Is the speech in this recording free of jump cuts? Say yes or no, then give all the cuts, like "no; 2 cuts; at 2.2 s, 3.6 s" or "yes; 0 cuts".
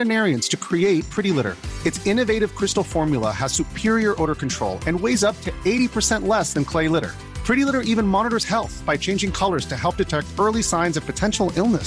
yes; 0 cuts